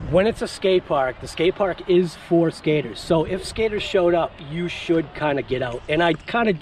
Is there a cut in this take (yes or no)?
no